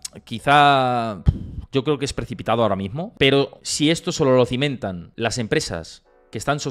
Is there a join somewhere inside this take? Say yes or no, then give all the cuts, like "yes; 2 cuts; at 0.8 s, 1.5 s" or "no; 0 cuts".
yes; 3 cuts; at 3.0 s, 3.6 s, 5.1 s